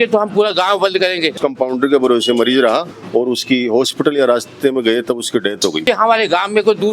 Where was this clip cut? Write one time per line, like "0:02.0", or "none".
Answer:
0:01.4
0:02.9
0:05.8